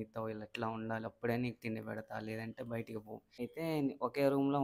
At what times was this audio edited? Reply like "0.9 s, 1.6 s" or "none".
3.2 s